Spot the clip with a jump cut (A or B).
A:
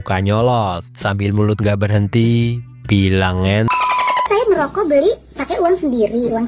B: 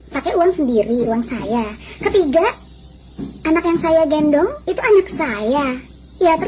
A